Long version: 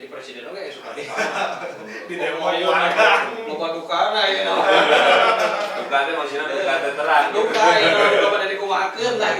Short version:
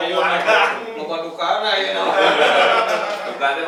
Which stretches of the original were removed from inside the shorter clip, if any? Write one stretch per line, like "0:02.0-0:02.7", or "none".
none

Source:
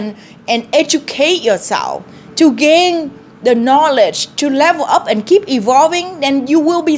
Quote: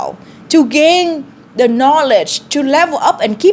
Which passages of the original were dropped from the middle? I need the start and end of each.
none

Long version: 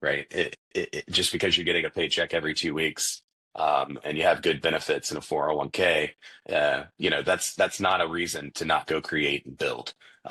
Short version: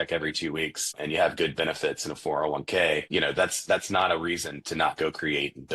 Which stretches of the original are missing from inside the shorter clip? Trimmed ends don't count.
0:03.1-0:04.0
0:06.1-0:06.9

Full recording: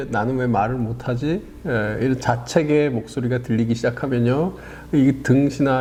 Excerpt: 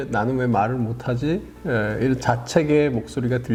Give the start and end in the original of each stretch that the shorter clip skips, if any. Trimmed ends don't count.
none

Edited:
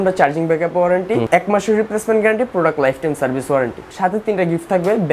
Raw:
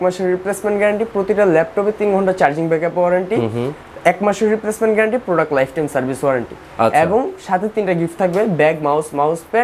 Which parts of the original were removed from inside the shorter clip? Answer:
0:03.5-0:04.0
0:06.6-0:07.4

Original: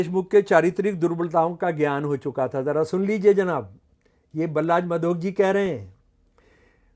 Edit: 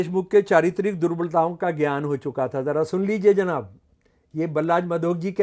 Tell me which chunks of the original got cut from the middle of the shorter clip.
none

